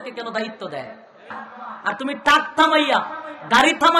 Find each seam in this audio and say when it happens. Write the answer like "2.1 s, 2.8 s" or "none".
1.5 s